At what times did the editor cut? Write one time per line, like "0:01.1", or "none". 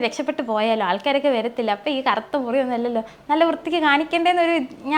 none